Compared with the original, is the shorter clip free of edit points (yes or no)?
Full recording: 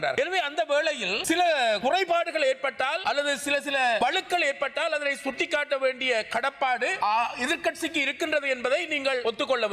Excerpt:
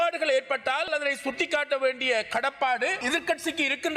no